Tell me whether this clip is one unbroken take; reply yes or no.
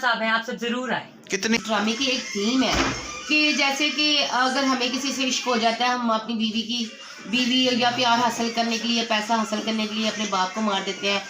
no